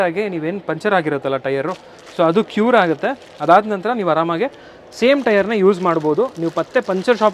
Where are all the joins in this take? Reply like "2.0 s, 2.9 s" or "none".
none